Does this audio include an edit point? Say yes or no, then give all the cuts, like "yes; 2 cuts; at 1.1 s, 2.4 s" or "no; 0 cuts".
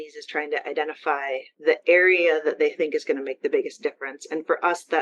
yes; 1 cut; at 1.5 s